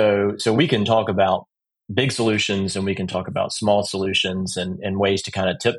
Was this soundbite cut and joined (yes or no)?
no